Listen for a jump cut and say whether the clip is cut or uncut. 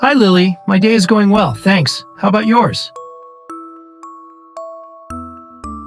cut